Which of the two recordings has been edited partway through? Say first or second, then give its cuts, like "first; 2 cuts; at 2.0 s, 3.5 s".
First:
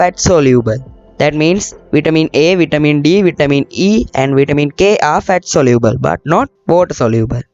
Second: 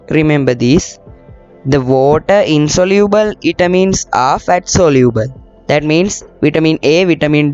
first; 1 cut; at 6.6 s